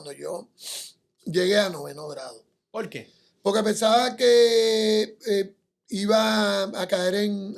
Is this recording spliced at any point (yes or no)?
no